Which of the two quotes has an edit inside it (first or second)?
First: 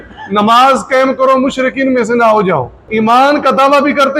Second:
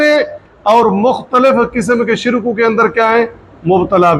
first